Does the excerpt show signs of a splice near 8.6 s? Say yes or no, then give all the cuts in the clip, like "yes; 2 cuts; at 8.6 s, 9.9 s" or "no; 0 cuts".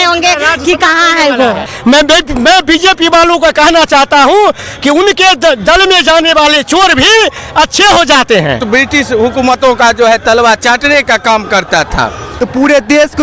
yes; 3 cuts; at 1.7 s, 8.6 s, 12.3 s